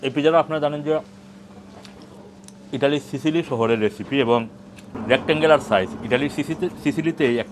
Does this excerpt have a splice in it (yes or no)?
no